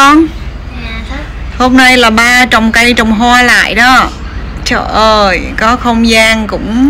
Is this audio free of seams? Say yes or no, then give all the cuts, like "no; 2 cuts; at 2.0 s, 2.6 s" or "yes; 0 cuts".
yes; 0 cuts